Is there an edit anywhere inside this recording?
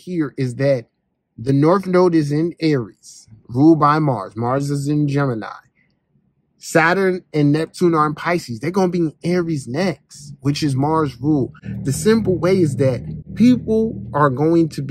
no; 0 cuts

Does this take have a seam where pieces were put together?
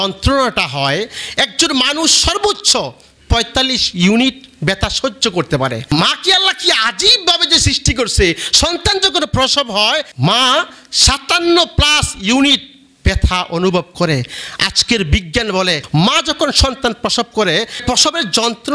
yes; 2 cuts; at 5.9 s, 10.1 s

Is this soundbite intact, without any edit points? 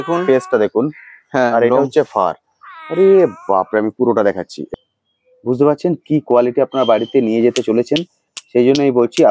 no; 1 cut; at 4.6 s

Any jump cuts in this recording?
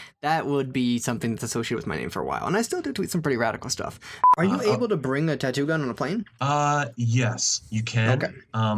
yes; 1 cut; at 4.1 s

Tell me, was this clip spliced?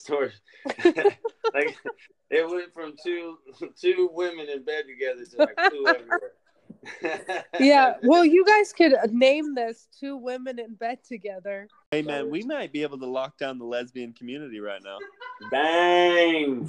yes; 1 cut; at 11.9 s

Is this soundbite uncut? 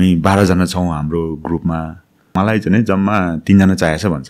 no; 1 cut; at 2.3 s

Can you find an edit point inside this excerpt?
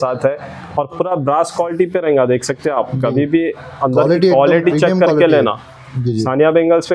no; 0 cuts

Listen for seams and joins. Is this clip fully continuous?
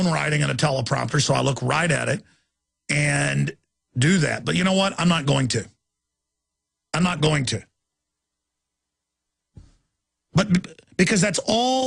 yes; 0 cuts

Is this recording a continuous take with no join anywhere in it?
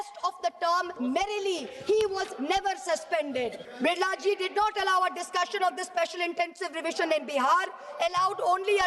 no; 1 cut; at 3.6 s

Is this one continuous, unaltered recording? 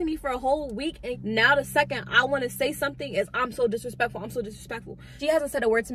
no; 2 cuts; at 1.1 s, 5.1 s

